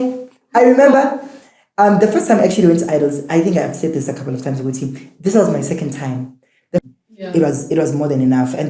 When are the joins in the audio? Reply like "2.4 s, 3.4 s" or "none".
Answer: 6.8 s